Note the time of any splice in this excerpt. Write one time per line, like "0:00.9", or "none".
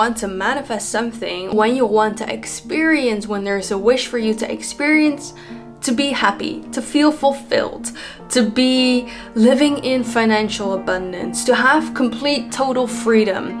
0:01.5